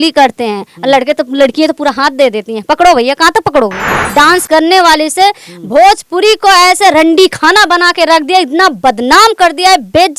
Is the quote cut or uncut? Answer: cut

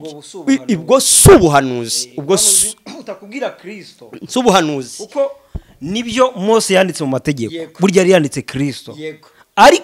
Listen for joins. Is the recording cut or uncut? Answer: uncut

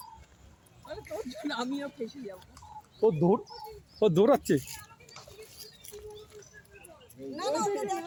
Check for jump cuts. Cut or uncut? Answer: uncut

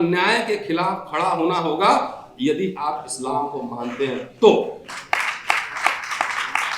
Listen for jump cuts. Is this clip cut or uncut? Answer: uncut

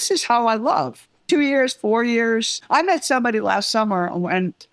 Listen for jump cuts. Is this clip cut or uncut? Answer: cut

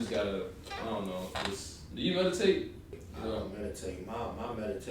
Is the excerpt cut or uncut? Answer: cut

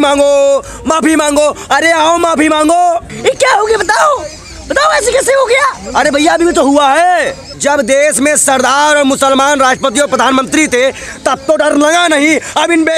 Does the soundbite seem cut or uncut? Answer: cut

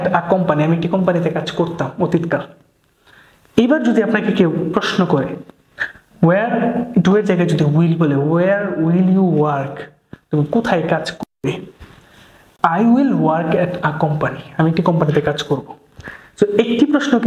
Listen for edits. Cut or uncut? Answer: uncut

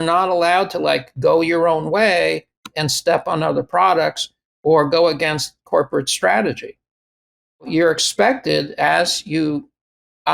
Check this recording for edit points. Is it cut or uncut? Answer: uncut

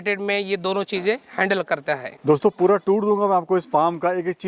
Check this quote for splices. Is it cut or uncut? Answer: uncut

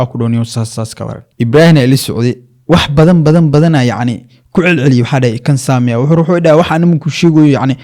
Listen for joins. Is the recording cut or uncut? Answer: cut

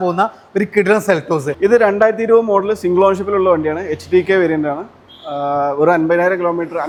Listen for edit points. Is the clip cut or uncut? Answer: uncut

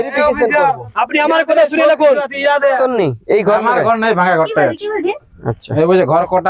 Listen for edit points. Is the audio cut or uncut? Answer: cut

